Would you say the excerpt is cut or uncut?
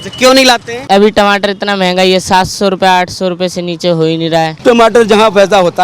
cut